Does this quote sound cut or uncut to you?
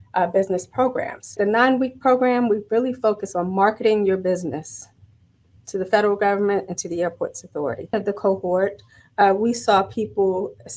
cut